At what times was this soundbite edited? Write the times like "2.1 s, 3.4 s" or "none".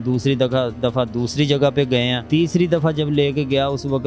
2.2 s